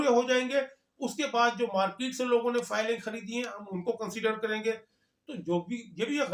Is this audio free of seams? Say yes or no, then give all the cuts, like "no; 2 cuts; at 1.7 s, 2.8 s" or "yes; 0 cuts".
yes; 0 cuts